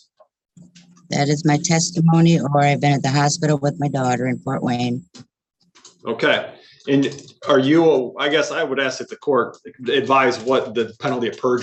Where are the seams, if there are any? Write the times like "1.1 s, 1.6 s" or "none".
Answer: none